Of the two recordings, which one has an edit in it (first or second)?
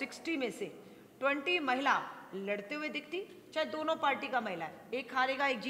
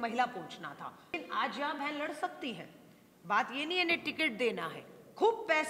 second